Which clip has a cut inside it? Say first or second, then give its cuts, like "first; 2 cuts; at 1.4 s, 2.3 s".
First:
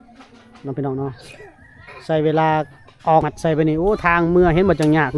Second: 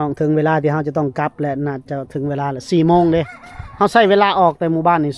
first; 1 cut; at 3.3 s